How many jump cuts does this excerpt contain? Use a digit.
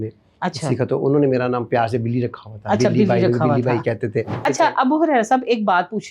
1